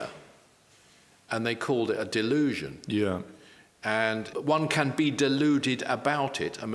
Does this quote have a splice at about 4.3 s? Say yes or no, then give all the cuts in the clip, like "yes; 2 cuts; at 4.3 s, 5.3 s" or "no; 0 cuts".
yes; 1 cut; at 4.3 s